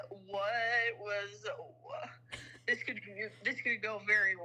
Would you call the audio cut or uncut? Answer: uncut